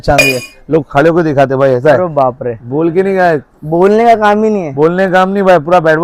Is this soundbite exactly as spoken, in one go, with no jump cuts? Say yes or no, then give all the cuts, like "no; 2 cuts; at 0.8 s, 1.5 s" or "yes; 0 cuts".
yes; 0 cuts